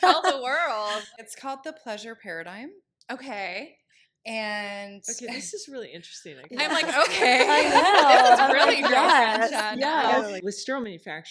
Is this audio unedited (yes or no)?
no